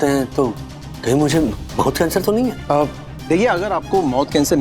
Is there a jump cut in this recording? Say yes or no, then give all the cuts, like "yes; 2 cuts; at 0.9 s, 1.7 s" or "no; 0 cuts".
yes; 1 cut; at 2.6 s